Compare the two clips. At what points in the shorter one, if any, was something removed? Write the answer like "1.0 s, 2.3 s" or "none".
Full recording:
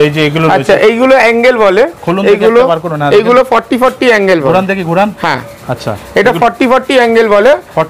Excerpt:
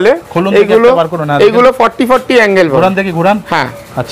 none